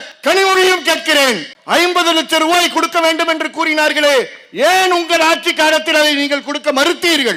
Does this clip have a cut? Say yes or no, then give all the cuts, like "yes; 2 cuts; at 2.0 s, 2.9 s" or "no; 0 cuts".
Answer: no; 0 cuts